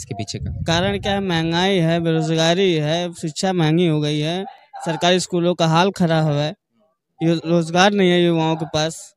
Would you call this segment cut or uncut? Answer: uncut